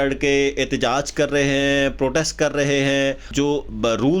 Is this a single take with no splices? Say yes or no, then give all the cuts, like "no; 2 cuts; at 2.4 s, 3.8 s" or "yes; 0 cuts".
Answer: no; 1 cut; at 3.3 s